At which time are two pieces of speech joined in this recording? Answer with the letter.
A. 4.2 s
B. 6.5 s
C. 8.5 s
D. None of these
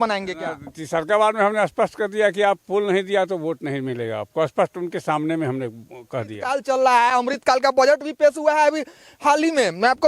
B